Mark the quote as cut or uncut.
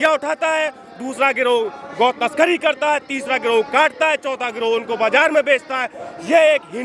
uncut